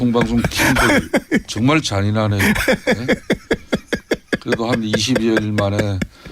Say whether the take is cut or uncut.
cut